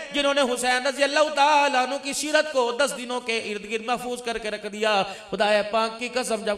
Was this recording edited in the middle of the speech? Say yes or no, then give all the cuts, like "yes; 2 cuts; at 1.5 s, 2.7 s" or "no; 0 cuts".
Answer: no; 0 cuts